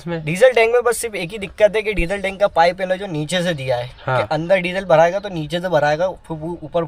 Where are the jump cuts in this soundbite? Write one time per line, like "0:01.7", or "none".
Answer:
none